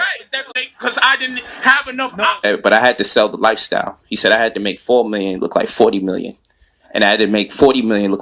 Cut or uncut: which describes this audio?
cut